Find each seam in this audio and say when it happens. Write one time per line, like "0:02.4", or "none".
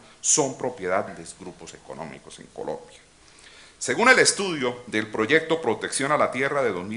none